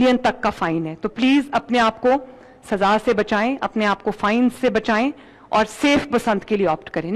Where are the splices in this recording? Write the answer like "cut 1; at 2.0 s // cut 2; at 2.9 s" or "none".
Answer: none